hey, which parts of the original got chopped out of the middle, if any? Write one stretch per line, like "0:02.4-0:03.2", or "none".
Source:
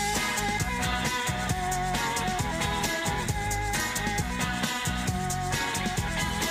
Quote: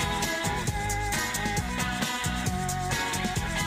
none